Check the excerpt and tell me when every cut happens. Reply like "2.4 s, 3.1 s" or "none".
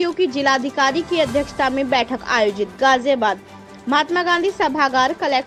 none